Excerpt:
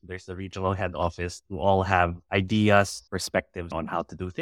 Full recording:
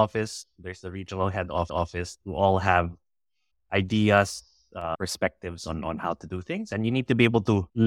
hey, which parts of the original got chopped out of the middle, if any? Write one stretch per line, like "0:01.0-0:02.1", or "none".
0:01.5-0:01.7
0:03.0-0:03.6
0:04.7-0:05.4